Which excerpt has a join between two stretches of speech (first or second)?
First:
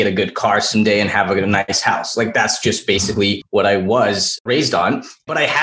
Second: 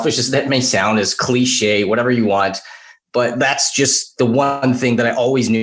first